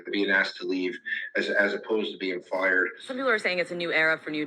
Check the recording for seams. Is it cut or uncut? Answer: cut